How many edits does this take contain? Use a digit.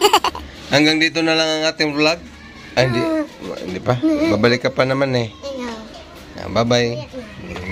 0